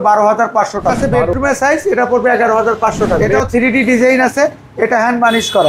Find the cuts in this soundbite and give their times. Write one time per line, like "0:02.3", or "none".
0:01.0
0:03.3